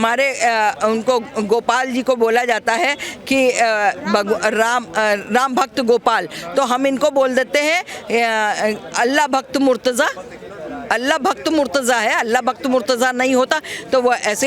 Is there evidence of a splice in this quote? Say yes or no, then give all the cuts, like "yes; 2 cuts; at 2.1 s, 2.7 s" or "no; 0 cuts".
no; 0 cuts